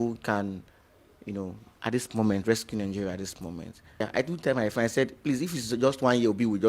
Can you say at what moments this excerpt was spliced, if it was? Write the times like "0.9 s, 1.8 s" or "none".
4.0 s